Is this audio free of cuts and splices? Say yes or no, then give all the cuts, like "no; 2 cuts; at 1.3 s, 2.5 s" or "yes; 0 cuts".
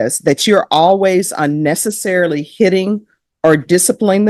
yes; 0 cuts